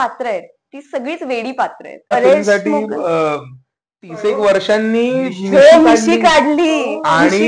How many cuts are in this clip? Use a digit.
1